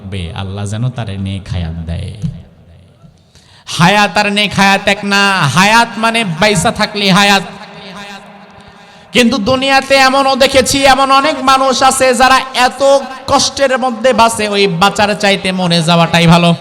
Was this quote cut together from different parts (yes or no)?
no